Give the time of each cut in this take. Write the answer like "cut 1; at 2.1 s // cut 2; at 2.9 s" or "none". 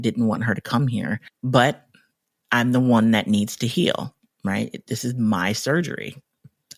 cut 1; at 1.3 s